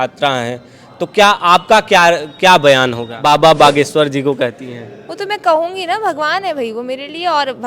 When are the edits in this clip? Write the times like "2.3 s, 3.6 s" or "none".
3.1 s

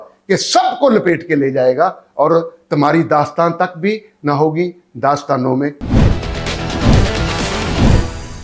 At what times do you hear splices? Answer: 5.8 s

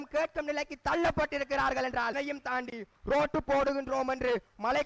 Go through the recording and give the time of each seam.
2.1 s

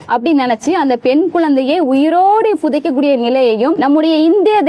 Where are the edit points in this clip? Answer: 3.8 s

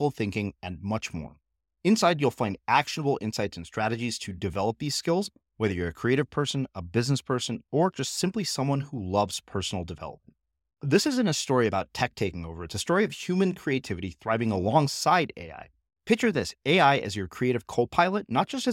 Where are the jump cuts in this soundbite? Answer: none

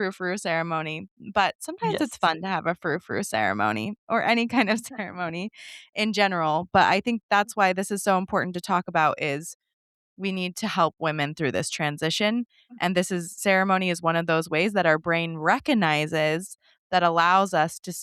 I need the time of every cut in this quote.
none

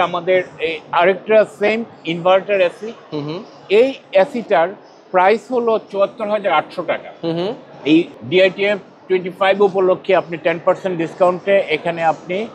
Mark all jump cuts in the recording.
none

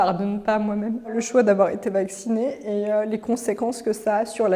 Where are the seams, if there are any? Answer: 1.2 s

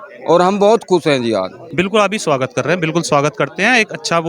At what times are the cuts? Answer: 1.6 s

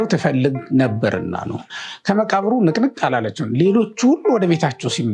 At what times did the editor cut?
1.7 s

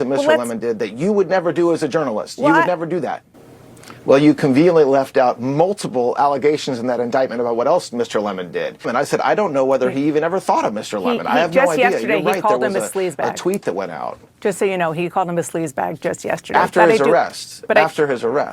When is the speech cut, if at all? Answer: 3.3 s, 8.9 s

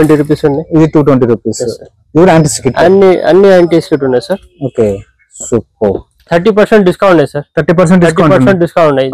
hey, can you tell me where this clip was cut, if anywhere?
6.3 s

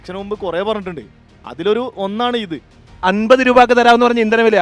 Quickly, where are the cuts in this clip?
3.0 s

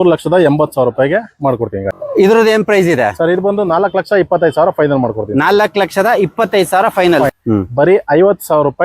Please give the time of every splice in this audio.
1.9 s, 7.3 s

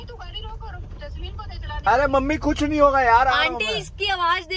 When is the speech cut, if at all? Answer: none

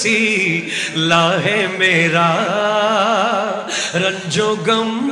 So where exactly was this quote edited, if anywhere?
none

